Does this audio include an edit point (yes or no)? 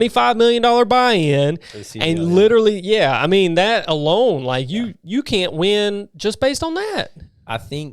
no